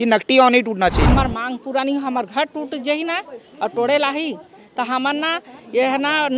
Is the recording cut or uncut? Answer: cut